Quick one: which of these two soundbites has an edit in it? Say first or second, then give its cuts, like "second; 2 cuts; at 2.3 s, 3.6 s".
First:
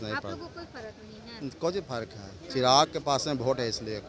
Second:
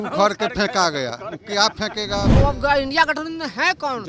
second; 1 cut; at 2.3 s